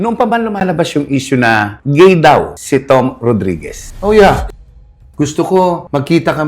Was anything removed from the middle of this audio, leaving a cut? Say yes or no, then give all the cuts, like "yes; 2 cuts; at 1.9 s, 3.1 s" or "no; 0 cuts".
yes; 1 cut; at 4.5 s